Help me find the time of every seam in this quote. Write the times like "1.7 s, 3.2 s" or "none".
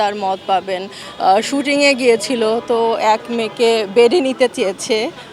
1.0 s